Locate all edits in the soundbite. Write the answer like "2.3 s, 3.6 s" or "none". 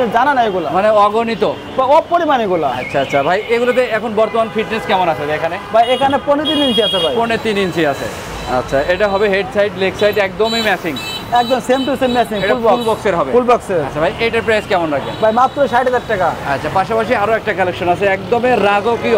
none